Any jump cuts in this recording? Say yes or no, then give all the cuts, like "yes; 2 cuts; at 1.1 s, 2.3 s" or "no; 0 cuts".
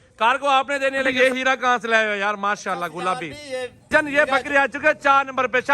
yes; 2 cuts; at 1.1 s, 3.8 s